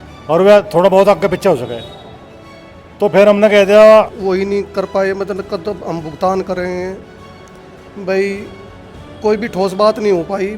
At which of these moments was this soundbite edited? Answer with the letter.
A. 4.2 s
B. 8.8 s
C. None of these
A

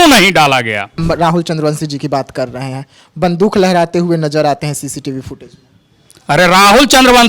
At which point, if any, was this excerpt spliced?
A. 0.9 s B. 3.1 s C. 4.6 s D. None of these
A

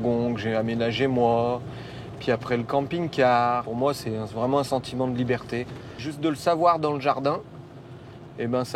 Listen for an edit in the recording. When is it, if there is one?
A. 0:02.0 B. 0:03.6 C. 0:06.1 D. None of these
C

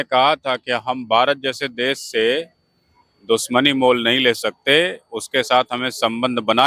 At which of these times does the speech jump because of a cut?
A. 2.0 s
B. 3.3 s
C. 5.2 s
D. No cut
D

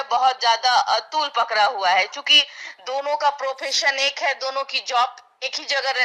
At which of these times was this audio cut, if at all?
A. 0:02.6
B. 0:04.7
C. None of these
C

